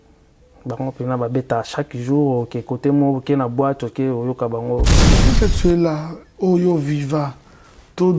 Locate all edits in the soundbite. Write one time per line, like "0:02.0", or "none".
0:05.2